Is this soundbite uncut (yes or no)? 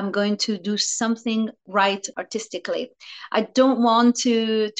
no